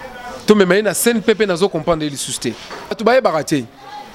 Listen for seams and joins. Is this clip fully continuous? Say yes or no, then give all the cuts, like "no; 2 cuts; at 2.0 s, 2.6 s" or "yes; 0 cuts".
no; 1 cut; at 3.0 s